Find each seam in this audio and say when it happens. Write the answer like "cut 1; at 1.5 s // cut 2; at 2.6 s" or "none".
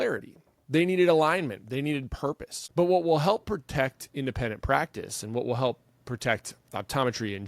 cut 1; at 2.5 s